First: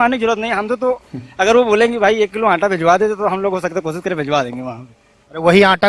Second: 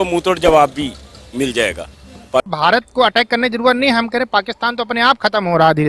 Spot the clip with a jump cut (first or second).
second